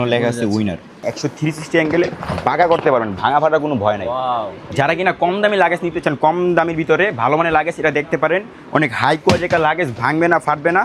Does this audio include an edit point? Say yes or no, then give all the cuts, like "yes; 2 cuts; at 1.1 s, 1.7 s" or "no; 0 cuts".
yes; 2 cuts; at 1.0 s, 4.6 s